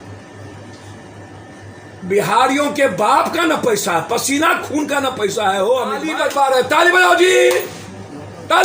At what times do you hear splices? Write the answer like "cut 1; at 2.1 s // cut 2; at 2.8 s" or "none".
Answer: cut 1; at 6.1 s

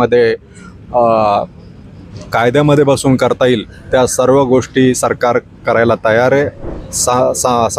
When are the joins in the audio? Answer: cut 1; at 6.6 s

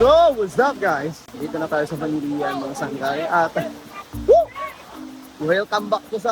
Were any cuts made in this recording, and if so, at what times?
none

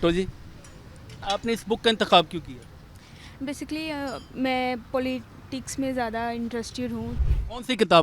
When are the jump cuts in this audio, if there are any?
cut 1; at 1.2 s // cut 2; at 7.2 s

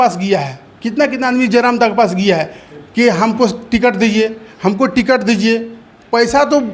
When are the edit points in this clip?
none

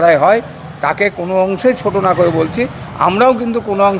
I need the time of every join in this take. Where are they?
none

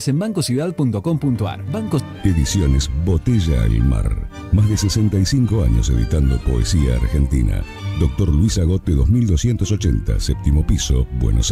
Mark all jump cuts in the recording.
cut 1; at 2.0 s // cut 2; at 4.5 s

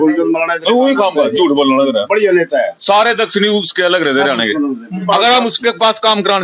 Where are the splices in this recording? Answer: cut 1; at 5.0 s

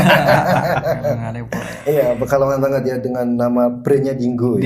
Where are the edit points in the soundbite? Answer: none

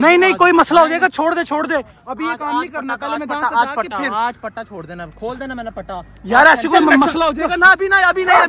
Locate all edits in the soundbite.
none

